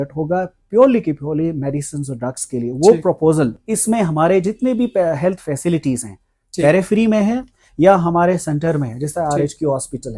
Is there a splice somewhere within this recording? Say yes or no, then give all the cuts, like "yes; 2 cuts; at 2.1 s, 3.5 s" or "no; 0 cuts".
no; 0 cuts